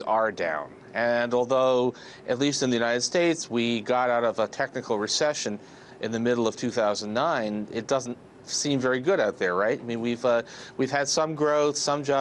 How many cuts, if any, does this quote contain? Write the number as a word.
one